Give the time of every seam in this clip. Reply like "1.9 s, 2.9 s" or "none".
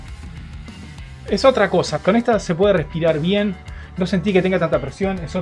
1.2 s, 1.9 s